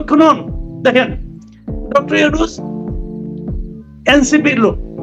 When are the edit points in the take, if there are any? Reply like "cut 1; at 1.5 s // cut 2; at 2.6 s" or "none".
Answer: cut 1; at 2.5 s // cut 2; at 4.0 s